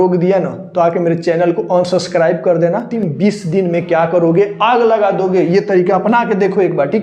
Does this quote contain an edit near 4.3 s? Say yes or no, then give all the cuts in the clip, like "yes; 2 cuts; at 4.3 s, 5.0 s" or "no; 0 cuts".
no; 1 cut; at 3.0 s